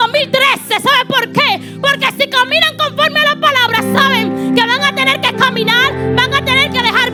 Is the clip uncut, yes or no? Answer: yes